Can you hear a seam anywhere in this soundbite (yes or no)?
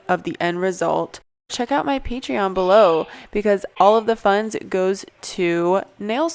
yes